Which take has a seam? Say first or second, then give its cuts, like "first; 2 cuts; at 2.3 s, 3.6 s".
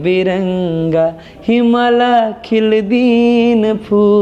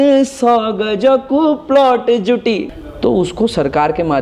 second; 1 cut; at 2.7 s